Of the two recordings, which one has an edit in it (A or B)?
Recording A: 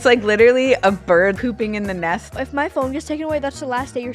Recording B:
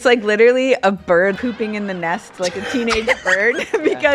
A